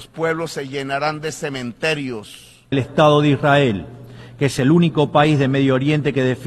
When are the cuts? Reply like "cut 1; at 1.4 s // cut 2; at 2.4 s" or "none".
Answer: cut 1; at 2.7 s